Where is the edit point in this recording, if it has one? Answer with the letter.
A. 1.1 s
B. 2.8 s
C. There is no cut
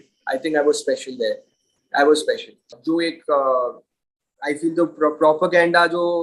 C